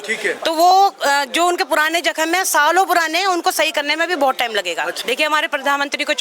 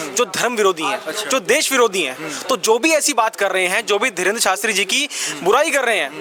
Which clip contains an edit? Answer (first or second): first